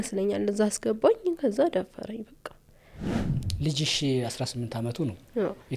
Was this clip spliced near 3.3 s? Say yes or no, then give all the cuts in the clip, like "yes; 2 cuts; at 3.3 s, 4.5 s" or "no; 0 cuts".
yes; 1 cut; at 3.3 s